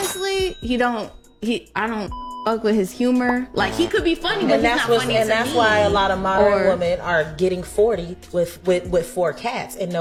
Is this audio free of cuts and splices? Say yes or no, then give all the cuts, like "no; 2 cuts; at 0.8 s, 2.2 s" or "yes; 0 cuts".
yes; 0 cuts